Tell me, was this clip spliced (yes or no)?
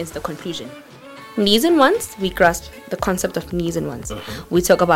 no